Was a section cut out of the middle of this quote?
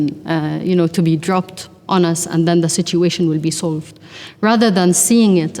no; 0 cuts

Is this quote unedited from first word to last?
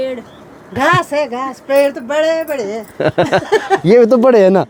yes; 0 cuts

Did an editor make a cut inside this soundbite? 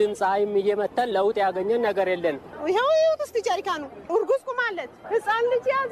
yes; 1 cut; at 4.1 s

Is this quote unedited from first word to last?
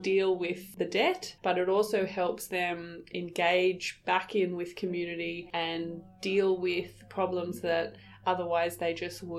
yes; 0 cuts

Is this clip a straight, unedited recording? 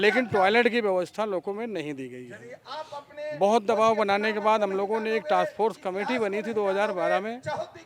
yes; 0 cuts

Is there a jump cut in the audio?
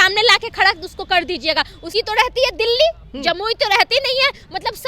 yes; 1 cut; at 1.9 s

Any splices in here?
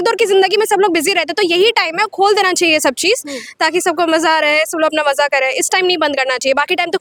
no; 0 cuts

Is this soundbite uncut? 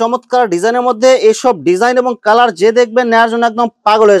yes; 0 cuts

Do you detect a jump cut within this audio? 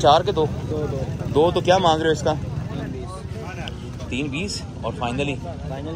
no; 0 cuts

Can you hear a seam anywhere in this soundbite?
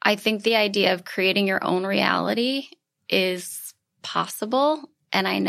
no; 0 cuts

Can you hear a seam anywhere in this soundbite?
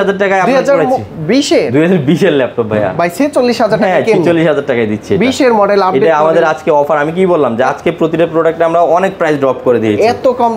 no; 0 cuts

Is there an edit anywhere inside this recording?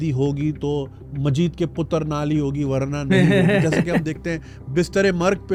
no; 0 cuts

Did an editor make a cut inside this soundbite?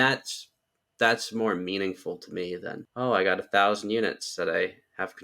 yes; 1 cut; at 2.8 s

